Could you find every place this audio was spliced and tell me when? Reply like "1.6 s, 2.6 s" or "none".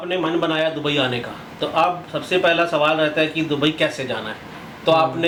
none